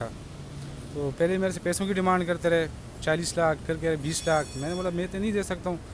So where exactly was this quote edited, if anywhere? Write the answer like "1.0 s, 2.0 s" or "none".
none